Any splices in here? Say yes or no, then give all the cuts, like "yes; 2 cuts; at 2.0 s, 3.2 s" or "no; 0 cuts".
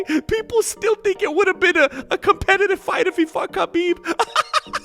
no; 0 cuts